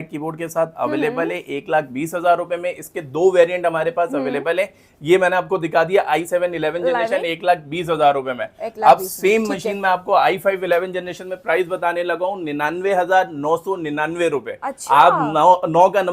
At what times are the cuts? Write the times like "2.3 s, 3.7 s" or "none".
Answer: none